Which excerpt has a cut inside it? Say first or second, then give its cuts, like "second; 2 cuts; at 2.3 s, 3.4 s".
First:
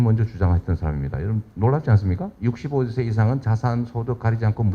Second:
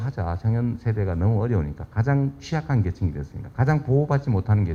first; 1 cut; at 2.3 s